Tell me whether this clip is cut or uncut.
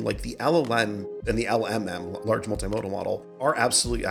cut